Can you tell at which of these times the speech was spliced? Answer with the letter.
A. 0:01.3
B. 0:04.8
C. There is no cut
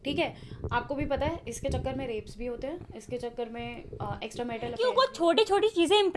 B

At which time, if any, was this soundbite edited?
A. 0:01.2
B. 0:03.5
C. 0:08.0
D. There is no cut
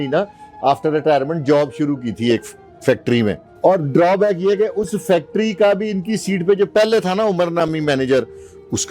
B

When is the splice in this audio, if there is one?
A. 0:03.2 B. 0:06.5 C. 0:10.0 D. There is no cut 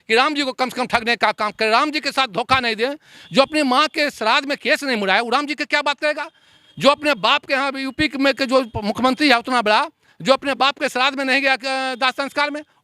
A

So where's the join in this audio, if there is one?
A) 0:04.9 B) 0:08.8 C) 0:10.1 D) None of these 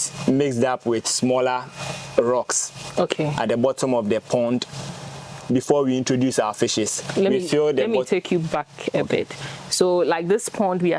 D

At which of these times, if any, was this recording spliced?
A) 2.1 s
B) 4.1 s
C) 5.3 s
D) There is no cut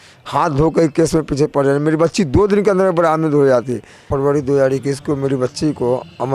B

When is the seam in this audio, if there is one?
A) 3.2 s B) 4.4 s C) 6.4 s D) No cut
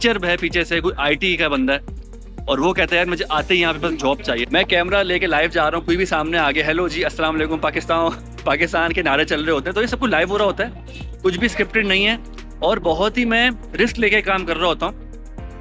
B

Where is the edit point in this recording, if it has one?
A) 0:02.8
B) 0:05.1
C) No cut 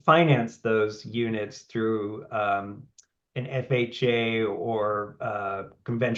C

